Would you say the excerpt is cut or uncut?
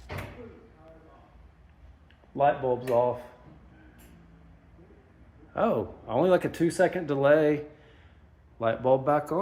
uncut